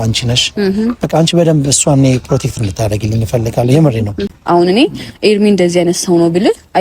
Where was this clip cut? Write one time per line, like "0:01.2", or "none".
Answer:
0:04.3